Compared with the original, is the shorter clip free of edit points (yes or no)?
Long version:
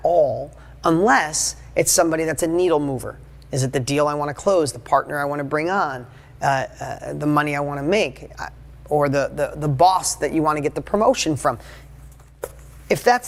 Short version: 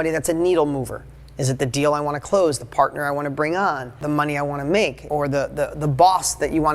no